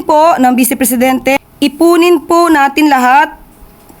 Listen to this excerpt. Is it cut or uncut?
cut